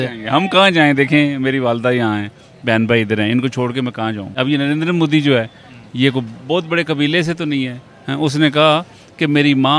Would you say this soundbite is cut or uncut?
cut